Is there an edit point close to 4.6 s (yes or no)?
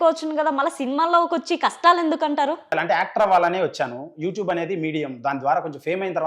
no